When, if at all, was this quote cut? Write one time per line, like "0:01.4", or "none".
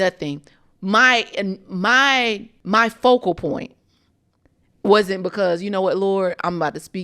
0:02.5